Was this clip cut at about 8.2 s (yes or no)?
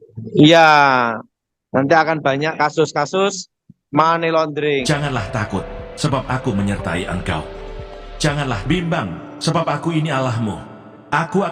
no